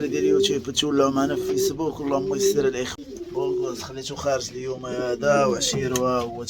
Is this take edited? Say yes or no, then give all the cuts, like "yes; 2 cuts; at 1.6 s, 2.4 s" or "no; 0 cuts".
yes; 1 cut; at 2.9 s